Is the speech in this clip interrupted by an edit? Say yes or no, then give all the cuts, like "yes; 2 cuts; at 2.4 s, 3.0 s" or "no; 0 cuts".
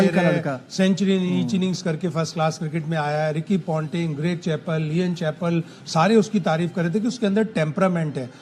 no; 0 cuts